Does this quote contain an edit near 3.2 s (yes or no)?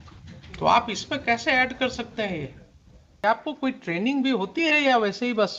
yes